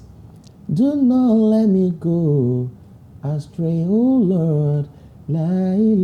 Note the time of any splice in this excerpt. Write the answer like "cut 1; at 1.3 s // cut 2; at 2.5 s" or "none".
none